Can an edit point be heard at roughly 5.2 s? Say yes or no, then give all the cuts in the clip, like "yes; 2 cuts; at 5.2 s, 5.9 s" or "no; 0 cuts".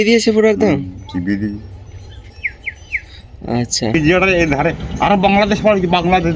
no; 1 cut; at 3.9 s